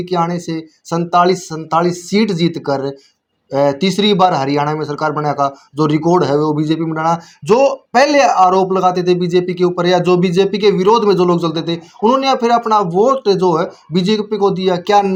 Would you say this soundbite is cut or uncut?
uncut